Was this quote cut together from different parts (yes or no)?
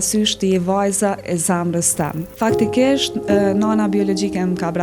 yes